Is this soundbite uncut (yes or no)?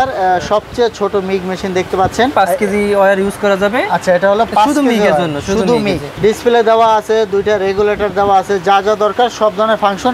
no